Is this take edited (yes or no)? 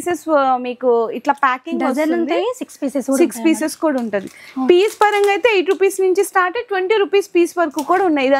no